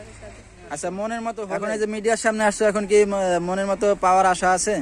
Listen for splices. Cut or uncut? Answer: cut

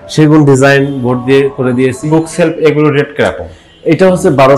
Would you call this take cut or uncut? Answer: cut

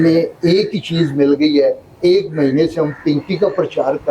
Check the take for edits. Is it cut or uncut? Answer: uncut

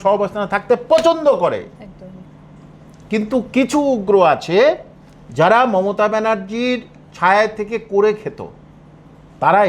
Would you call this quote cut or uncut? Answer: uncut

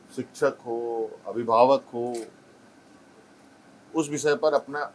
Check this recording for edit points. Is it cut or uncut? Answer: uncut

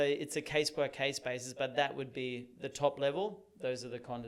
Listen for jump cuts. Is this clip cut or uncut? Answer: uncut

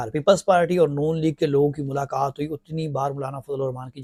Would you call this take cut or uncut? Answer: uncut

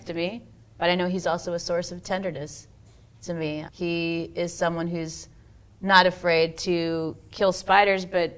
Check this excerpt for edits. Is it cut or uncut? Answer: cut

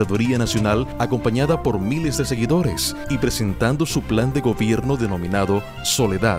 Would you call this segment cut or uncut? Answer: cut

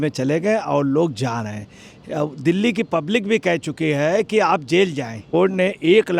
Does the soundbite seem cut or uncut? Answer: cut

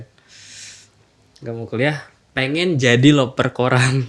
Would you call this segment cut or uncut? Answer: uncut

